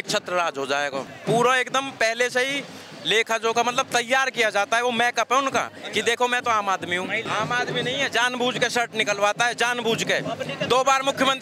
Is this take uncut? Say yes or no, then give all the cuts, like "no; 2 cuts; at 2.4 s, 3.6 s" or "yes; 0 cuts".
no; 2 cuts; at 1.1 s, 7.2 s